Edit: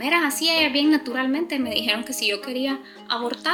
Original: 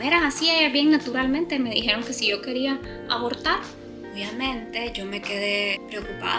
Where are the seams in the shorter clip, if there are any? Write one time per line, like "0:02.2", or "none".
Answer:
none